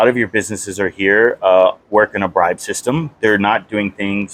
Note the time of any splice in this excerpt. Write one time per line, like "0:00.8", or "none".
none